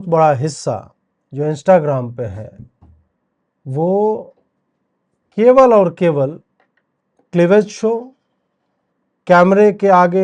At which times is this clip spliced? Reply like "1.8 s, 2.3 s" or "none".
none